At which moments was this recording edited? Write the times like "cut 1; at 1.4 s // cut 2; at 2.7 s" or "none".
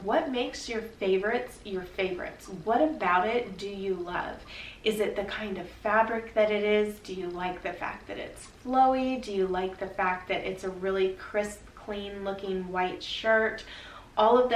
cut 1; at 2.6 s